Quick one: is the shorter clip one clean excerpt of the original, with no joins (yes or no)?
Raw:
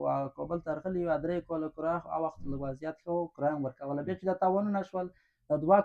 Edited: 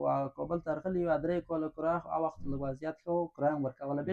yes